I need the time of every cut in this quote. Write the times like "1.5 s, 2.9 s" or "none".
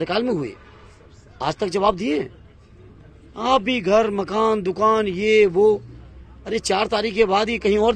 none